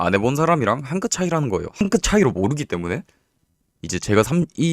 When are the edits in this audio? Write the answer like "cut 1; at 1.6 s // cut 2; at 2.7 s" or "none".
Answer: cut 1; at 1.7 s